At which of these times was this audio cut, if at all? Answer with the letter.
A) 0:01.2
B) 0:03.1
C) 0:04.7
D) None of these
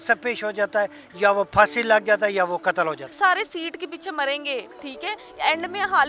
B